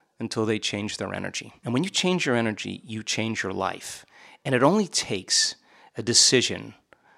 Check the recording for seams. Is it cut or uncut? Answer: cut